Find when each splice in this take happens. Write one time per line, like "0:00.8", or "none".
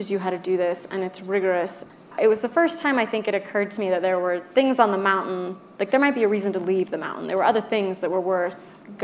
0:01.8